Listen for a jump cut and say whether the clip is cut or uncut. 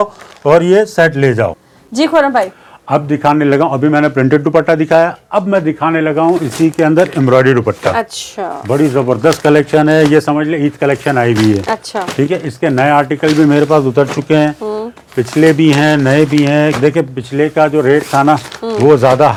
uncut